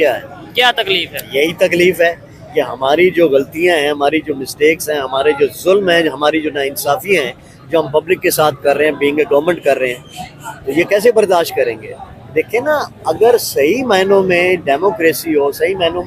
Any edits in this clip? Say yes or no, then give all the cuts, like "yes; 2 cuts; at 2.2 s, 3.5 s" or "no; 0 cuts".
no; 0 cuts